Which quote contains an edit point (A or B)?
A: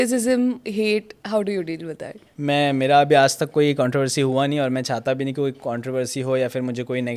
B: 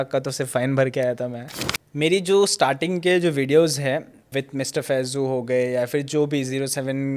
B